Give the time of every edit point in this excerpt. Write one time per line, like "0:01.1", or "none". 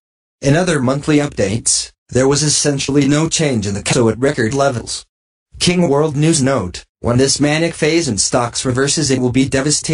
none